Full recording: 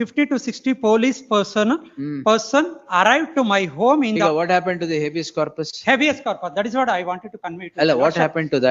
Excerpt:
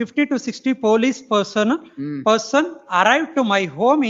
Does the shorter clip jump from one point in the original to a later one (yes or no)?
no